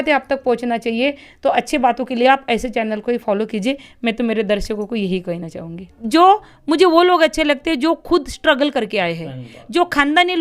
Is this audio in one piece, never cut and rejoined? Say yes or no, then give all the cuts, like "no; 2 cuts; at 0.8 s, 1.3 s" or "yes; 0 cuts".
no; 1 cut; at 6.0 s